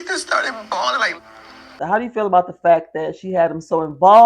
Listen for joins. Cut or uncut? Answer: cut